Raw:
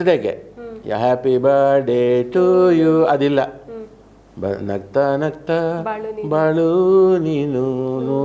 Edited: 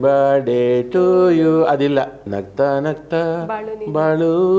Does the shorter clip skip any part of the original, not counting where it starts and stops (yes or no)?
yes